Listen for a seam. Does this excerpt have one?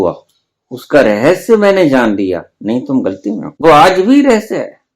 yes; 1 cut; at 3.5 s

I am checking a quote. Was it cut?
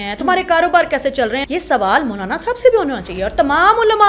yes; 1 cut; at 1.4 s

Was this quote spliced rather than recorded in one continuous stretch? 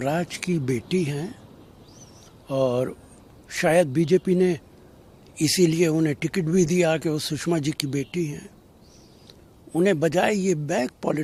no; 0 cuts

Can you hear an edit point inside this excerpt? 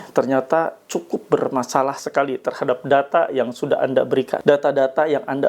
yes; 1 cut; at 4.3 s

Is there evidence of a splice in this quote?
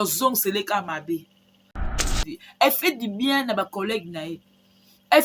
yes; 1 cut; at 1.9 s

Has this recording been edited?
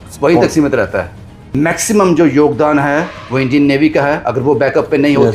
yes; 1 cut; at 1.5 s

